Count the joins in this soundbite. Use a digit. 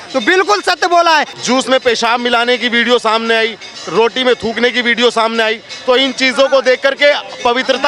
1